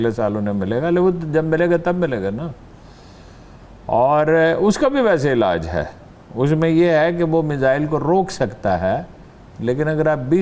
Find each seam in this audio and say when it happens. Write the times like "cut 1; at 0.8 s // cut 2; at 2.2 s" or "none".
none